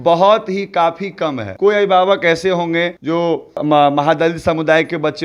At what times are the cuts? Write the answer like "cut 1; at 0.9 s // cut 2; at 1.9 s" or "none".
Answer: cut 1; at 1.5 s // cut 2; at 3.1 s